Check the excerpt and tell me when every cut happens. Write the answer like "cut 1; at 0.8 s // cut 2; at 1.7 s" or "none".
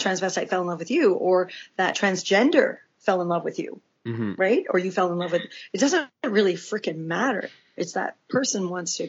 cut 1; at 1.9 s